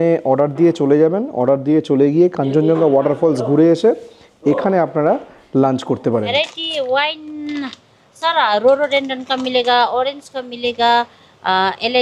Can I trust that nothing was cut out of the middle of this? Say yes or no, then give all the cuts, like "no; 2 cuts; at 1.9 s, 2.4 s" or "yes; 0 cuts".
no; 1 cut; at 6.3 s